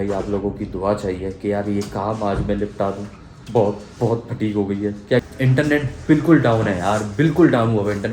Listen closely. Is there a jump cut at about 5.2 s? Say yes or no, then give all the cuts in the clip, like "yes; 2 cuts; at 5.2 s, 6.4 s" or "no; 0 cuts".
yes; 1 cut; at 5.2 s